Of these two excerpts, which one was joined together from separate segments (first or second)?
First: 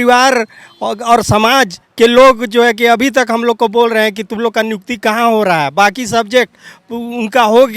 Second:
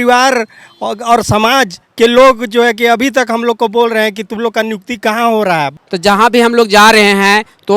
second